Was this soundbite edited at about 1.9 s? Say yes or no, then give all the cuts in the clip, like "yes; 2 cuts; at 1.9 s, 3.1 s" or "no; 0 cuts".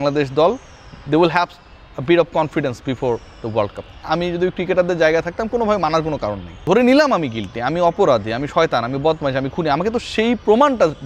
no; 2 cuts; at 4.0 s, 6.5 s